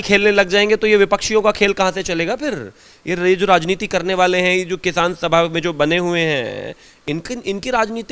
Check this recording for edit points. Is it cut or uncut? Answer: uncut